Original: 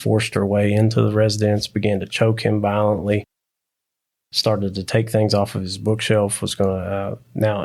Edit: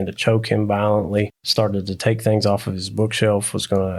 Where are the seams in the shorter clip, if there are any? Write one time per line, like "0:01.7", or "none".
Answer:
0:01.4